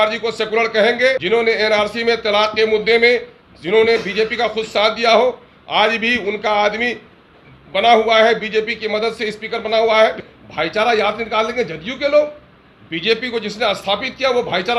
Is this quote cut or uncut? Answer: cut